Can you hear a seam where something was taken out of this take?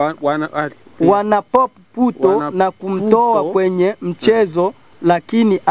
no; 0 cuts

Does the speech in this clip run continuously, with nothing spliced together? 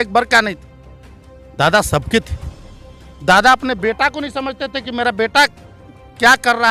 yes; 0 cuts

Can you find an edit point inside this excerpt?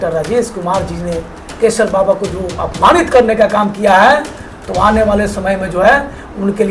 no; 0 cuts

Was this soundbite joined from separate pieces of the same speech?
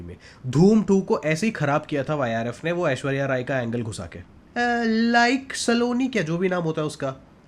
yes; 1 cut; at 4.5 s

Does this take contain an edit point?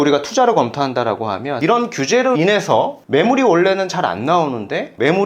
yes; 2 cuts; at 1.5 s, 3.0 s

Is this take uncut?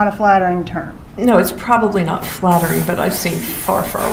yes; 0 cuts

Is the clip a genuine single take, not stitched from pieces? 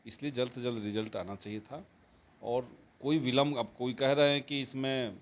yes; 0 cuts

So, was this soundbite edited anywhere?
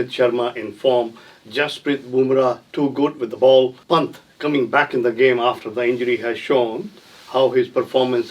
yes; 1 cut; at 3.8 s

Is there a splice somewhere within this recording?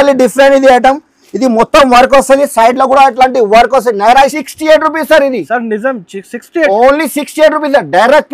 yes; 1 cut; at 4.4 s

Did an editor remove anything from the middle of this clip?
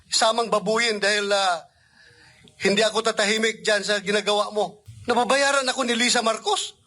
yes; 1 cut; at 4.9 s

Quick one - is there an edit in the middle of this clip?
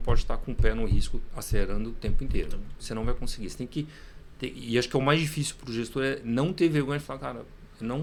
no; 0 cuts

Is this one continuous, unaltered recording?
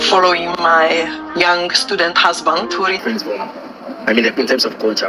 no; 1 cut; at 3.0 s

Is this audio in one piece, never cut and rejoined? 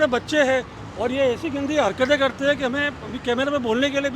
yes; 0 cuts

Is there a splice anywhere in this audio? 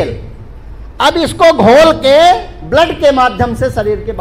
no; 0 cuts

